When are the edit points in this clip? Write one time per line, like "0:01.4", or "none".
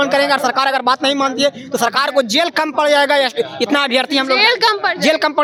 none